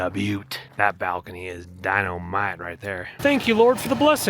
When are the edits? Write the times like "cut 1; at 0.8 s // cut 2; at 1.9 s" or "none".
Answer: cut 1; at 3.1 s